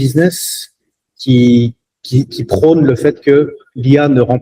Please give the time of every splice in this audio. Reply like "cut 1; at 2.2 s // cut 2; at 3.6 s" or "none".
none